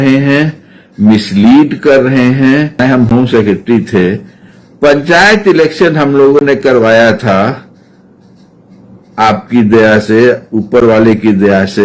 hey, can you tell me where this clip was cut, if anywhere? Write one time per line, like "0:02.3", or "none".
0:02.8